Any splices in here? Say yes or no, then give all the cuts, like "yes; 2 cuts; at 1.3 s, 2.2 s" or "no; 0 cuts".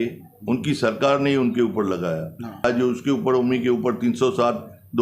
yes; 1 cut; at 2.6 s